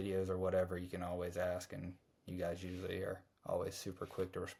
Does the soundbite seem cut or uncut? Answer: uncut